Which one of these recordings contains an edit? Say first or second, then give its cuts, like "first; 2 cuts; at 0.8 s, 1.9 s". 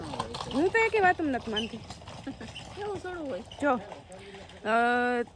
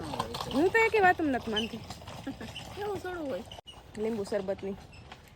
second; 1 cut; at 3.6 s